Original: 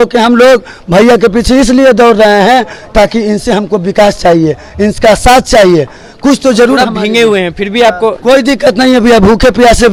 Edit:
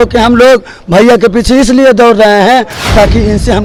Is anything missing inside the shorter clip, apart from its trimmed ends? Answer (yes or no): no